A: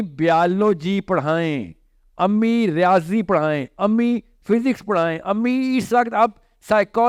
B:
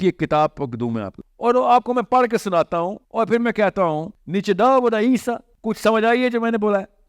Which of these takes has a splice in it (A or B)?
B